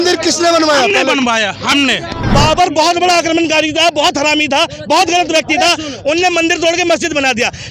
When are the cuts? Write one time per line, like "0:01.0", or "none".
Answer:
0:02.1